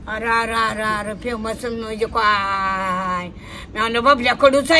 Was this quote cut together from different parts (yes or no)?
no